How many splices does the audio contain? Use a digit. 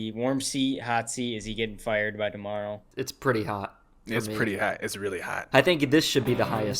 2